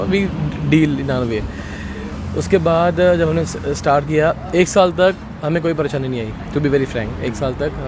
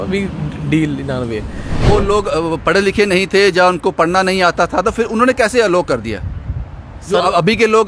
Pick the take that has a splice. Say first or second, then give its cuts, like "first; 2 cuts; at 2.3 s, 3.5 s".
second; 1 cut; at 1.8 s